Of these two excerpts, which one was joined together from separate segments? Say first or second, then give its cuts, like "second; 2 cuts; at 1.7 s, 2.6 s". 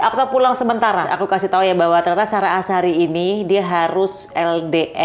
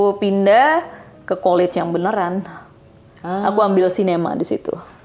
first; 1 cut; at 1.1 s